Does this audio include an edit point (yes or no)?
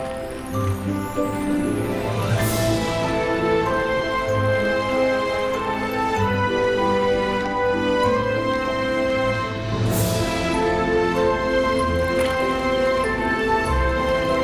no